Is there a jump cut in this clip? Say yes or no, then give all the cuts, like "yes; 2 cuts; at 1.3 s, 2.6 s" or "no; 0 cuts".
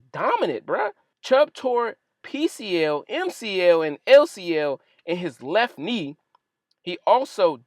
yes; 2 cuts; at 1.1 s, 2.2 s